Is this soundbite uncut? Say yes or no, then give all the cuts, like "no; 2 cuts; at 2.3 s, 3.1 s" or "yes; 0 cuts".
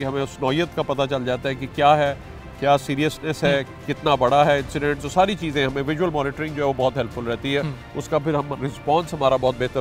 yes; 0 cuts